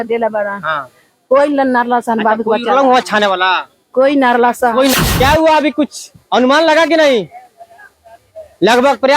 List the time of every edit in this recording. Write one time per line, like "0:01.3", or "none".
0:04.9